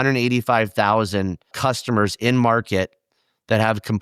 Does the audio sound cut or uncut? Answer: cut